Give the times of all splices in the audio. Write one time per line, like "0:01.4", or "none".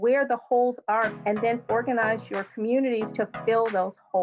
0:01.5
0:03.1

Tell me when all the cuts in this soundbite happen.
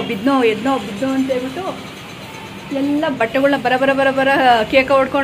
none

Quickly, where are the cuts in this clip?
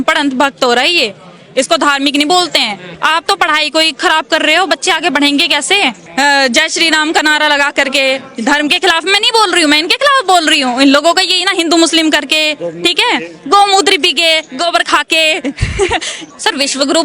0:02.9
0:06.1
0:16.2

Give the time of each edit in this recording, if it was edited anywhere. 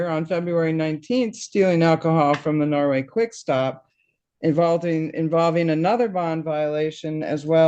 none

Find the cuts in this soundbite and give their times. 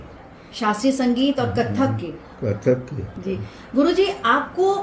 0:03.2

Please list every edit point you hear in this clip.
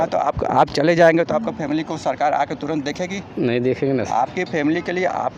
none

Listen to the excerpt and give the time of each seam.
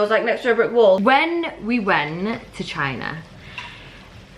0:01.0

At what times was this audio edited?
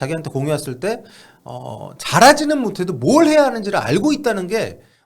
none

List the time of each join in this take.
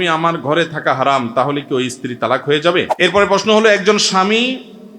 0:02.9

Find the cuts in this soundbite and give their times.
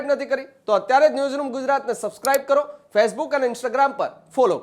none

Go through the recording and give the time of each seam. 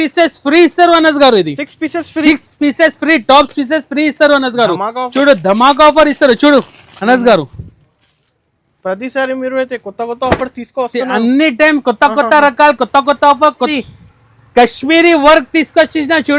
0:13.7

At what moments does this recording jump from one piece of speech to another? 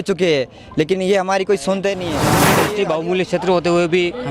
0:02.5

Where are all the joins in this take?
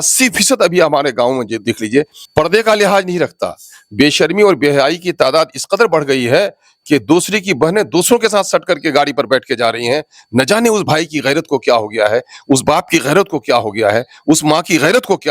0:02.2

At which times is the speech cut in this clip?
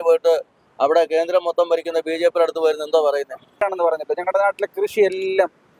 0:03.6

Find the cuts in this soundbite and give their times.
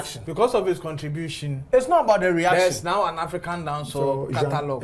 none

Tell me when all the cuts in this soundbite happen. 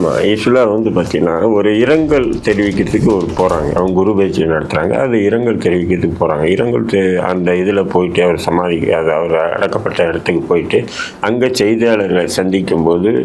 0:03.7

